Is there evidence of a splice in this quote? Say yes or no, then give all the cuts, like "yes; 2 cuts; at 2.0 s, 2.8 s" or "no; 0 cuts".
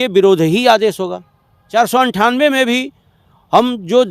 yes; 1 cut; at 1.6 s